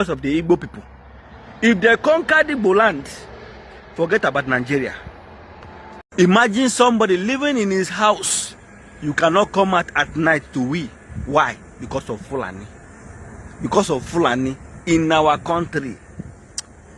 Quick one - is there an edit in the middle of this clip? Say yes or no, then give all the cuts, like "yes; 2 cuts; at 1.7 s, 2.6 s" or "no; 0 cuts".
no; 0 cuts